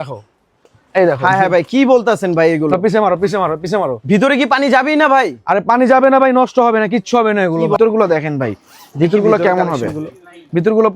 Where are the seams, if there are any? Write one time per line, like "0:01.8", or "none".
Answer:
0:07.8